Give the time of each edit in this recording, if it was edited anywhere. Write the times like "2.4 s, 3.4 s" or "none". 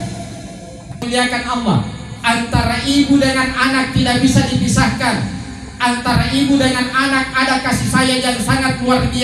1.0 s